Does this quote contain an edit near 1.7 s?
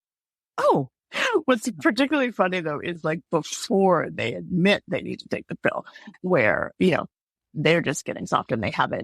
no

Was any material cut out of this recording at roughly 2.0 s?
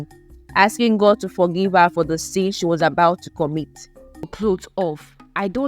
no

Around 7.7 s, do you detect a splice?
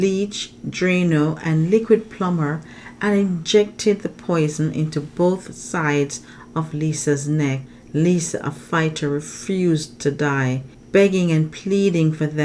yes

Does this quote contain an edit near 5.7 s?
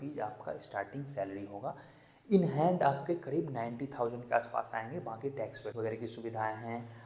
yes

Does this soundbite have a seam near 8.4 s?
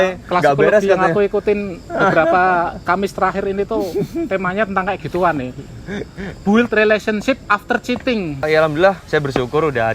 yes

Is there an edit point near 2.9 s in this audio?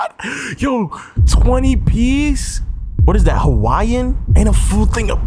yes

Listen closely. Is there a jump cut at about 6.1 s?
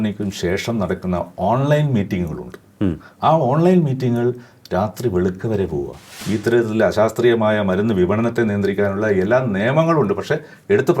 yes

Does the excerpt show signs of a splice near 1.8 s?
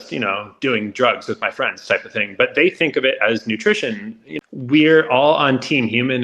no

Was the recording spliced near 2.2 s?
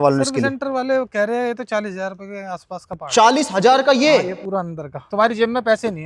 no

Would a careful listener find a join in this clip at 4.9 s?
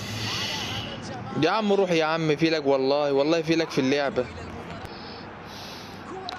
yes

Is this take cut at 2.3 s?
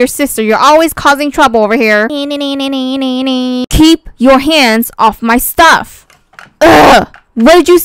no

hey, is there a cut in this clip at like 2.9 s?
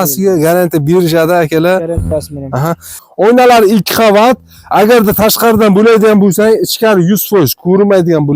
yes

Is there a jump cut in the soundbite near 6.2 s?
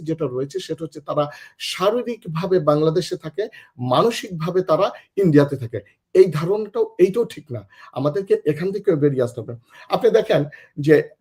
no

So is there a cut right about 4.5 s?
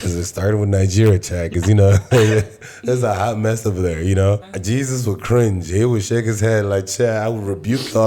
yes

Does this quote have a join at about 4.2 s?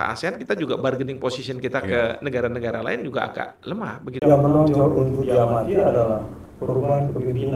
yes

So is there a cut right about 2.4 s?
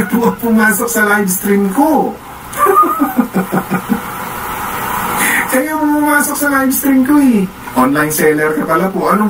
no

